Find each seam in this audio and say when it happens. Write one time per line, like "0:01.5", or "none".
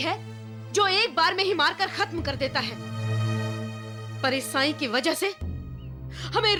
none